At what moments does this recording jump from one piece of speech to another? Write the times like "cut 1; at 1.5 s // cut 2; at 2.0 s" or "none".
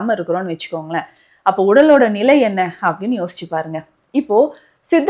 none